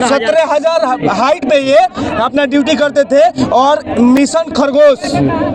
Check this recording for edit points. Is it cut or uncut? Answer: uncut